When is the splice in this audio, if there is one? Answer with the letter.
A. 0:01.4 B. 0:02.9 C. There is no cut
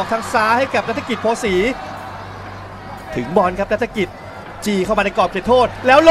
C